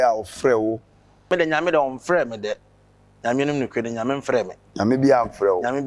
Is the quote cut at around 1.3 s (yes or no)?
yes